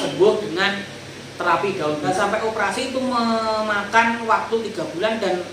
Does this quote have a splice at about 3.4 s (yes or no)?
no